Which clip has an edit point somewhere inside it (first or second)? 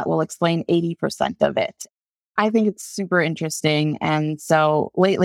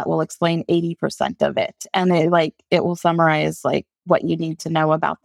first